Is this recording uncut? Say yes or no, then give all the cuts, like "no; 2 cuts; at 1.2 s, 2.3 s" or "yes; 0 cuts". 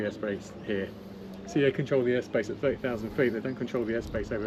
yes; 0 cuts